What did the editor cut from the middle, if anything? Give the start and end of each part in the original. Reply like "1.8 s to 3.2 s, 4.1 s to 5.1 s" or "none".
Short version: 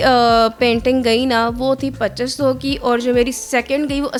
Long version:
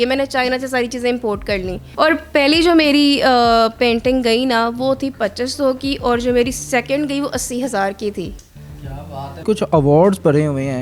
none